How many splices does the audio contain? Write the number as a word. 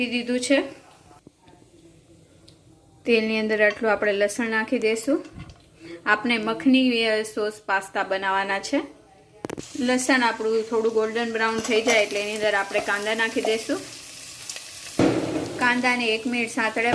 zero